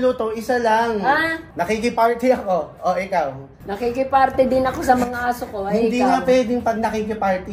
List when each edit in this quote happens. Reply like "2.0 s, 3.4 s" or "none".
1.4 s